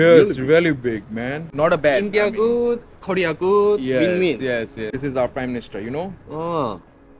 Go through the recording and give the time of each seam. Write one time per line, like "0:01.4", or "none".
0:01.4
0:04.9